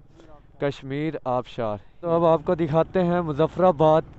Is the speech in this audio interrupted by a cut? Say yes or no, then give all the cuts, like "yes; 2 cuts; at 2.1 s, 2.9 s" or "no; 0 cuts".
yes; 1 cut; at 2.0 s